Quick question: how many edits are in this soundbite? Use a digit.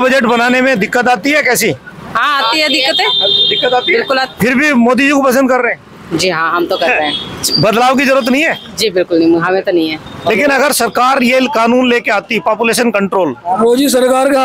1